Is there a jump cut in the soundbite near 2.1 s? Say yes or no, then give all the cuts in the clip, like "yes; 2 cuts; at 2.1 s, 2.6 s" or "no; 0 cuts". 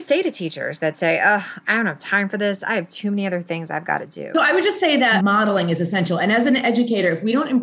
no; 2 cuts; at 4.3 s, 5.1 s